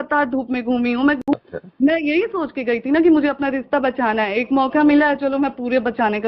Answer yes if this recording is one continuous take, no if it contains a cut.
no